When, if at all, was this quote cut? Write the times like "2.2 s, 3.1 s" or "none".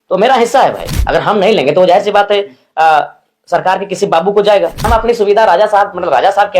0.9 s, 4.9 s